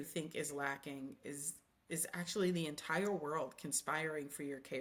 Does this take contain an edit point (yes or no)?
no